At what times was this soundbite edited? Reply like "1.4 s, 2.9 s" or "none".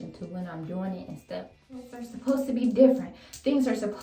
2.0 s